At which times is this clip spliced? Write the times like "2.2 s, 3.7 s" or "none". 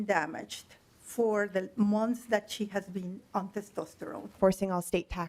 4.4 s

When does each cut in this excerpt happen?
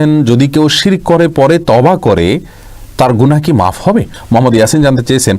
4.2 s

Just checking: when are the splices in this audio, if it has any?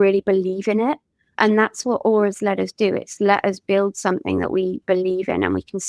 3.1 s

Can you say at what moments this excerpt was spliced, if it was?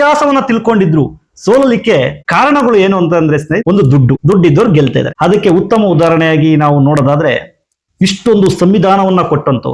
2.2 s, 4.0 s, 5.1 s

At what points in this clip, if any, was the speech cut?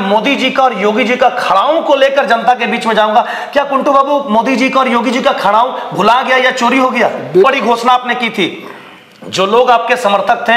7.4 s

